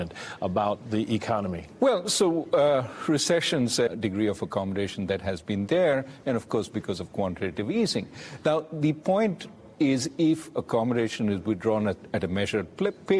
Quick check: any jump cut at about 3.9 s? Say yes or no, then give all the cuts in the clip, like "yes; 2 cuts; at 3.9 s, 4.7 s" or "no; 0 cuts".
no; 0 cuts